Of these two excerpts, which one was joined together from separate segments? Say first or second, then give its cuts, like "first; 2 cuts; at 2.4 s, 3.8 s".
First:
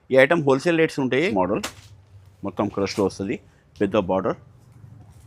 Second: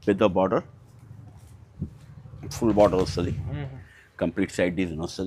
first; 1 cut; at 1.3 s